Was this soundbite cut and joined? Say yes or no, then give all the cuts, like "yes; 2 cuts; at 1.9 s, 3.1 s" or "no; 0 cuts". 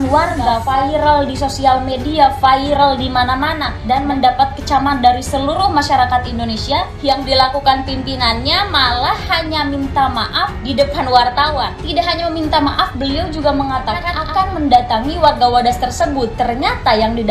no; 0 cuts